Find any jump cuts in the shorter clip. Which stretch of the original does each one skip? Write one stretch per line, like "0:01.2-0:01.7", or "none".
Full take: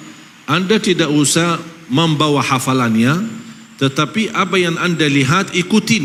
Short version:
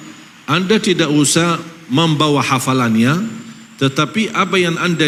none